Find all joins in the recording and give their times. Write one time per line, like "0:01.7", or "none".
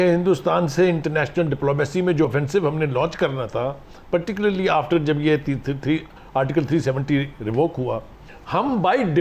none

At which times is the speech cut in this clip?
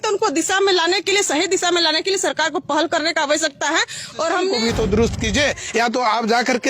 0:04.6

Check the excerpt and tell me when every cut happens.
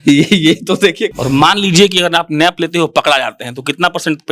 0:01.1

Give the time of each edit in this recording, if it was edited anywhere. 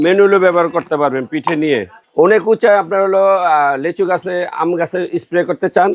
0:02.0

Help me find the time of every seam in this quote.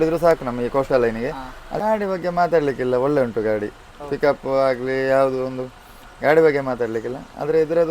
0:01.8

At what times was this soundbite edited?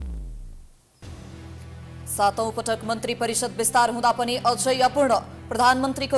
0:01.0

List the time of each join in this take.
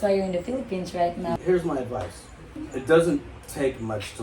0:01.4
0:02.5

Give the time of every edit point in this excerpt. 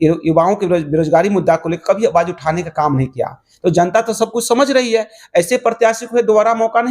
none

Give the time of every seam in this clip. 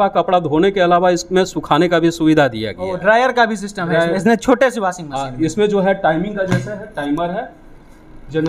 none

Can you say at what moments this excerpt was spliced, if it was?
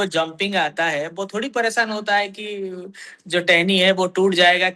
none

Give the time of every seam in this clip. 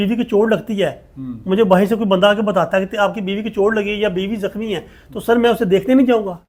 none

